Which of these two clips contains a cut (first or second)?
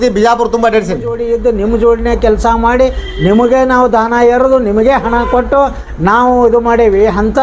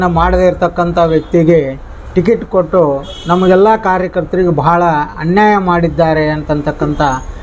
first